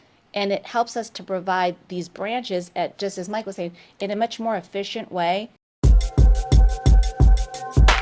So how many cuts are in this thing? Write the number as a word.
one